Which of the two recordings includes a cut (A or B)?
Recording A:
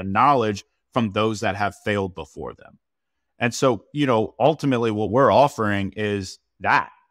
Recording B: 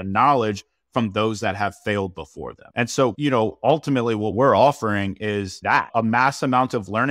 B